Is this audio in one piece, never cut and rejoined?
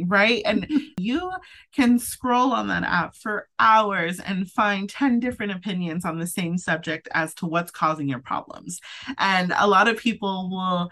no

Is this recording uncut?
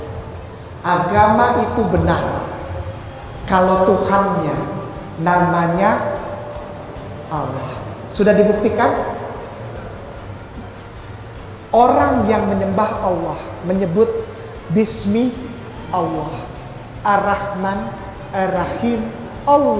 yes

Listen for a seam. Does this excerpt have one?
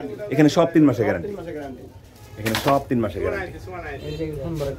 no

